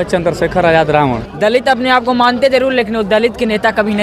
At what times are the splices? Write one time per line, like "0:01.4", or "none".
0:01.3